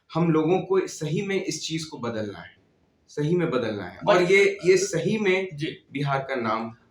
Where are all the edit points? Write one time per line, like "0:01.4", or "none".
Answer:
none